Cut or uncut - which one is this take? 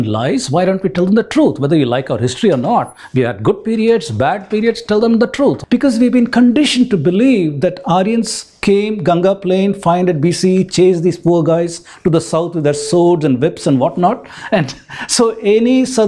cut